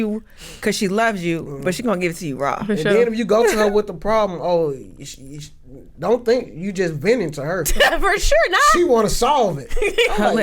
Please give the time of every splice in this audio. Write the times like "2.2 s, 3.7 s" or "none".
none

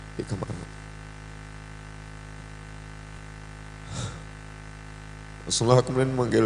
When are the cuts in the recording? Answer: 3.2 s

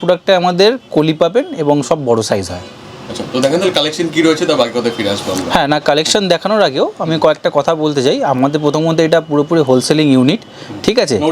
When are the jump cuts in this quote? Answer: none

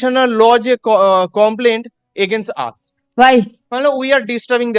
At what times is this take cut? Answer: 3.6 s

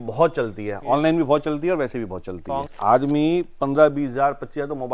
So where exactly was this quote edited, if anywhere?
2.7 s

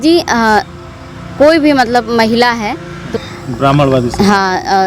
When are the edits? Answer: 3.0 s

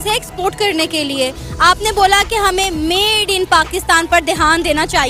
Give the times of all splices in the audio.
none

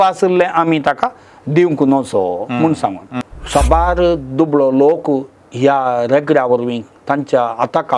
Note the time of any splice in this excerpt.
3.2 s

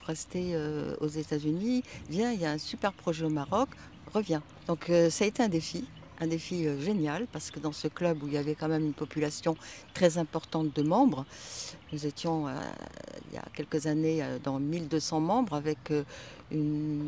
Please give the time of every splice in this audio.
none

